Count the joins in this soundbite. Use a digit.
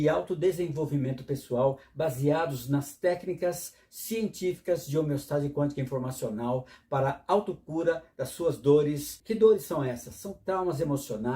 1